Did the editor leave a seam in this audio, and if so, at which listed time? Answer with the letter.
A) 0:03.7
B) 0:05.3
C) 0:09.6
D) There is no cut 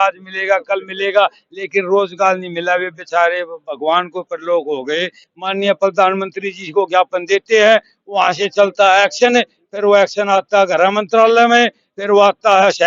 B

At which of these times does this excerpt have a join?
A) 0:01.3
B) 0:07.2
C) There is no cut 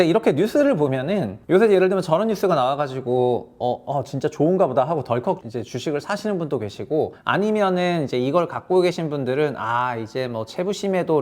A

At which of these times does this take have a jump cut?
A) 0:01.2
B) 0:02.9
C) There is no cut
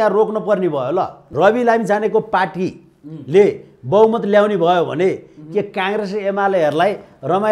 A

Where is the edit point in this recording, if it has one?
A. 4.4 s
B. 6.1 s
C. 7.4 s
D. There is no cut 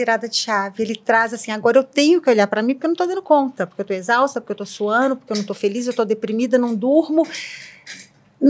D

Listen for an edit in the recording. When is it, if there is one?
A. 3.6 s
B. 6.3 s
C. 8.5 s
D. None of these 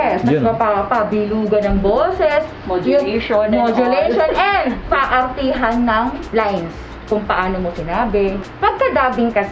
C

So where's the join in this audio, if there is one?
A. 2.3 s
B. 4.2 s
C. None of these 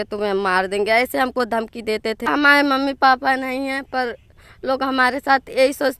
A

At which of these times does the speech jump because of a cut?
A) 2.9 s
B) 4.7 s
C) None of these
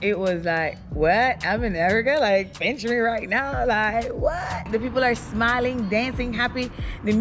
B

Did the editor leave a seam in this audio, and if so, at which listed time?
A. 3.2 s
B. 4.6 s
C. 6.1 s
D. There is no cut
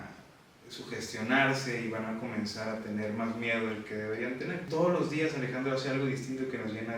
B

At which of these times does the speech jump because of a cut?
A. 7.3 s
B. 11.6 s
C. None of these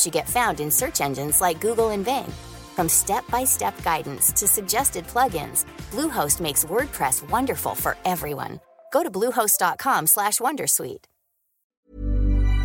B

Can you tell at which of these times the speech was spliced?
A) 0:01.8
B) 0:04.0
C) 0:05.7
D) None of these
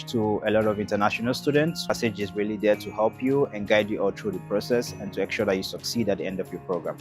A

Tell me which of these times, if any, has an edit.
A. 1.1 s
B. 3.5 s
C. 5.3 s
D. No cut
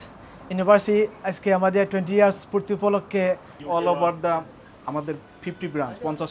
B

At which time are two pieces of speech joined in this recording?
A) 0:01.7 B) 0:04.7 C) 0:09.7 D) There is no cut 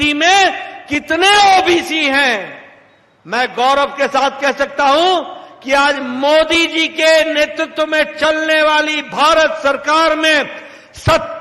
D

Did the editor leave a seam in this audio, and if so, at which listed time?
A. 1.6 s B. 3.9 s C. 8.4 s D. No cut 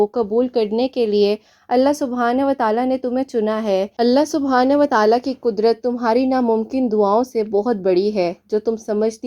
B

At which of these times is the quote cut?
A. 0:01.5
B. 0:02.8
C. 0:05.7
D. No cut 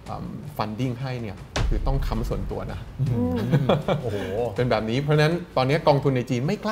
D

